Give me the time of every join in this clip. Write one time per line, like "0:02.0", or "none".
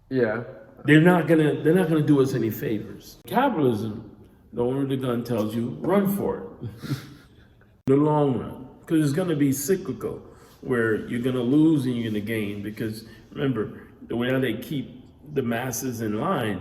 0:03.3
0:07.9